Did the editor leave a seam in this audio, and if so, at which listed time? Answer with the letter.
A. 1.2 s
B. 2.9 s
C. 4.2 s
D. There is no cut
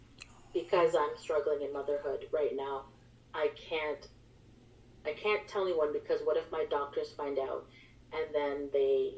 D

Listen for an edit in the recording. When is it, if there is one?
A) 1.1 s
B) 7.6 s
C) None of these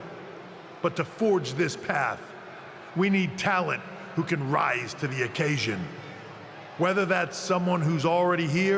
B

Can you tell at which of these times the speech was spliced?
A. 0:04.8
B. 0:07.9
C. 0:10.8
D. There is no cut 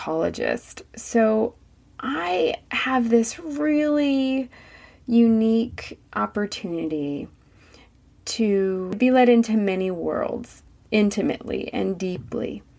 D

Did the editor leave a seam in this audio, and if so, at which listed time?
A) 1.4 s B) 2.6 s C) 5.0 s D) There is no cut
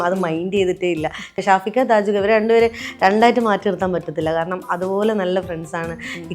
A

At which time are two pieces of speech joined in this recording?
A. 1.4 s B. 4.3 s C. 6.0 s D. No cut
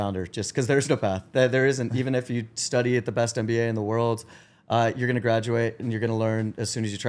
D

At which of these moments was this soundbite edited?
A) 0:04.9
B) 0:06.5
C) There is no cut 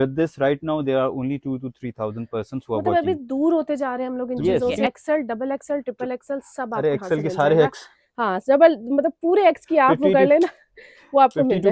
A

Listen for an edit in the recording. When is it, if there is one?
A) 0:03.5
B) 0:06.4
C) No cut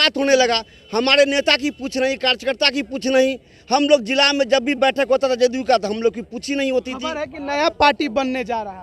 C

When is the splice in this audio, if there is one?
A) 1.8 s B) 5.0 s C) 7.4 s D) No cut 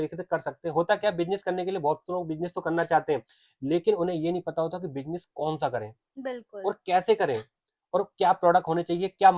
D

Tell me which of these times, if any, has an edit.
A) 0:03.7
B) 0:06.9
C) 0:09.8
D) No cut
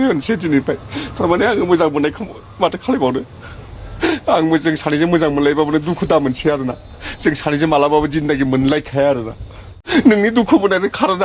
C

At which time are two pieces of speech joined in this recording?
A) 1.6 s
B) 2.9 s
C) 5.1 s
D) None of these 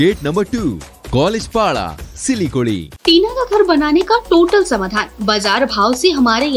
B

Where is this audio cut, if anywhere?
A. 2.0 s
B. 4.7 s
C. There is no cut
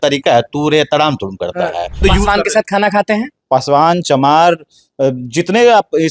A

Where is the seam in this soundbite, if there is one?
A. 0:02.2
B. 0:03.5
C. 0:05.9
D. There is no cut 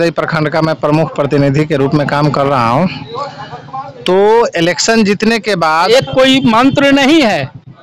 C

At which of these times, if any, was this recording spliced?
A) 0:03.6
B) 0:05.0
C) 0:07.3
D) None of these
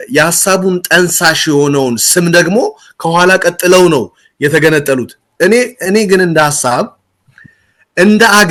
D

